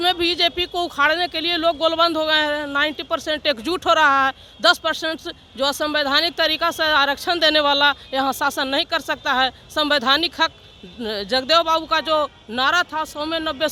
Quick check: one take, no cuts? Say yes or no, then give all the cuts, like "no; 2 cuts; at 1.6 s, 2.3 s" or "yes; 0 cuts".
yes; 0 cuts